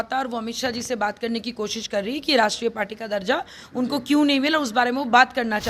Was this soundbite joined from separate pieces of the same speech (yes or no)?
no